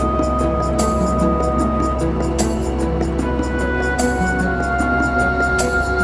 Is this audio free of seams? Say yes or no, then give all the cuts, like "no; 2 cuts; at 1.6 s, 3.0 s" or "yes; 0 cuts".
yes; 0 cuts